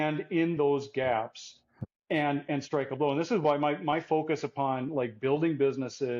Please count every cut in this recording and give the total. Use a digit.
0